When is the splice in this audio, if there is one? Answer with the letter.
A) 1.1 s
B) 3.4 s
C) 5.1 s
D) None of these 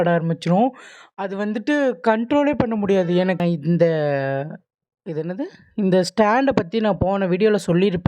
B